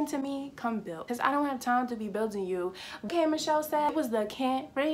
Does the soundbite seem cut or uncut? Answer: uncut